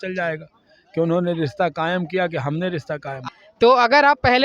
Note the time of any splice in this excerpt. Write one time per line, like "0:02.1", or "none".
0:03.3